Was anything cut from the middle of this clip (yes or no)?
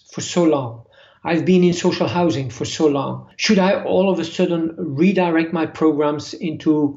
yes